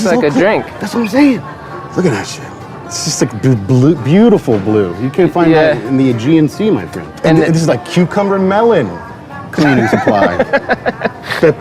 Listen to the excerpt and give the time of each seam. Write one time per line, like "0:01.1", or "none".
0:01.5
0:07.0